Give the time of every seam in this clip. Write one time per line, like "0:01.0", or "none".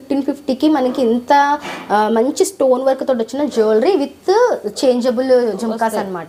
none